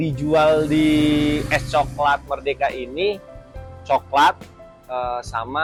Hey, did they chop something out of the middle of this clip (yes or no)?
no